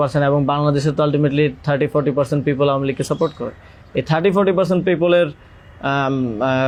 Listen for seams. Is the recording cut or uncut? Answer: uncut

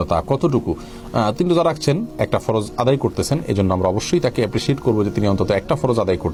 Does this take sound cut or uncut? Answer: uncut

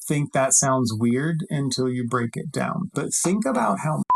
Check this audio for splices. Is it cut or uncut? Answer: cut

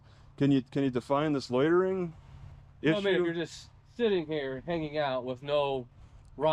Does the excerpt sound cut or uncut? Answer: uncut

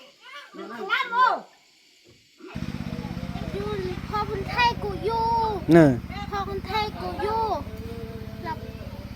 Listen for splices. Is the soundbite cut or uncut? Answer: cut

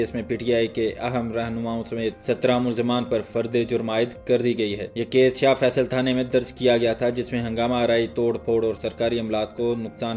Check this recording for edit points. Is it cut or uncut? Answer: uncut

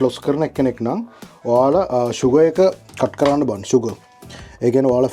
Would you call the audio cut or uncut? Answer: uncut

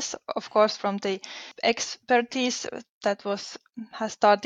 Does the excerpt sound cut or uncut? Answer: cut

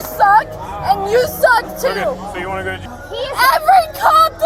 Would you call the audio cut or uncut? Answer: cut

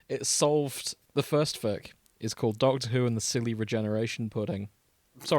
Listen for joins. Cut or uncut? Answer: cut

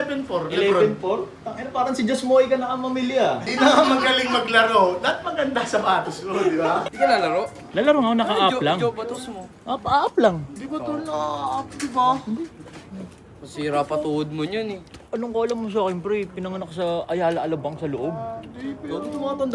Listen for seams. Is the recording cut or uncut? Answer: cut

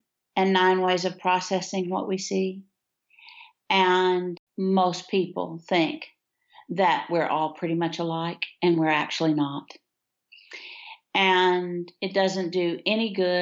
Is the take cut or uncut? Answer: cut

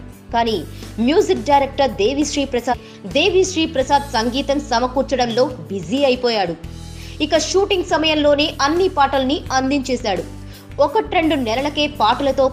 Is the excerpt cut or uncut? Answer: uncut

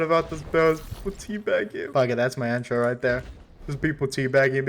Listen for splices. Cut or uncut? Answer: cut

